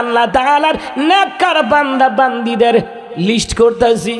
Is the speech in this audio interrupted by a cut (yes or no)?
no